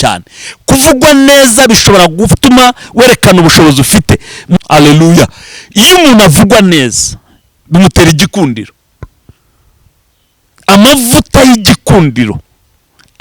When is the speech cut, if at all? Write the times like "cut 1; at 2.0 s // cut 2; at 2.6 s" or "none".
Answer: cut 1; at 4.6 s